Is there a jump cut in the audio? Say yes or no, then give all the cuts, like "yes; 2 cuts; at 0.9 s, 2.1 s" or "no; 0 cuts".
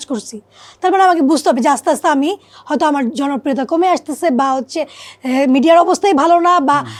no; 0 cuts